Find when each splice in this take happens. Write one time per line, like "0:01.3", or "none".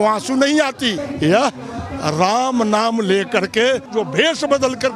0:01.1
0:03.9